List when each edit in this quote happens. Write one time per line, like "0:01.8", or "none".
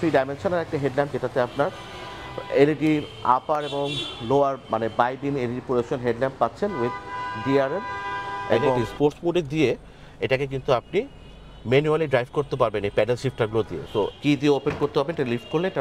0:08.9
0:14.1